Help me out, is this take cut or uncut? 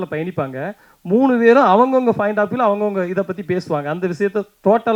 uncut